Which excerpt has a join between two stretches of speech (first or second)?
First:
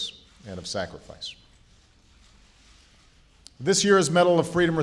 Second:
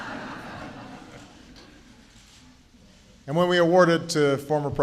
second